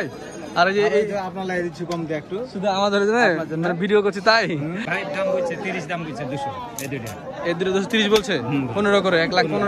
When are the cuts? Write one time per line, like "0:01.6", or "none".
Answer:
0:04.8